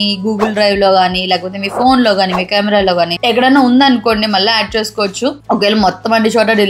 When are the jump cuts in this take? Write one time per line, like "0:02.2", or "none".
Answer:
none